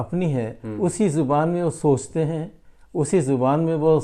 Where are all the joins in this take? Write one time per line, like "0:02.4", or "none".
none